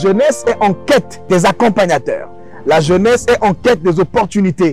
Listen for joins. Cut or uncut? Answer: cut